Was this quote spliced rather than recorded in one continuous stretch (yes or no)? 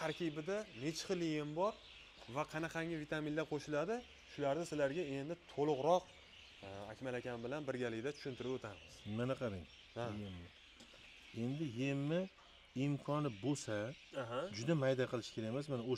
no